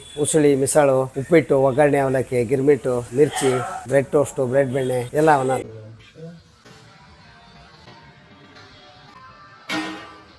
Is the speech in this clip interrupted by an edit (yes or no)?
yes